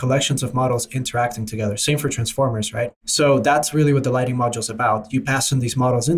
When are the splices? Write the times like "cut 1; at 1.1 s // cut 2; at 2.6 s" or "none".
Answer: cut 1; at 3.0 s